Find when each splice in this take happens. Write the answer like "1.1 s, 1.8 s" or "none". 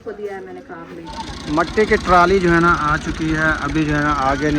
1.2 s